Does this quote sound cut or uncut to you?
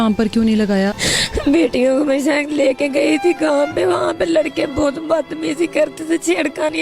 cut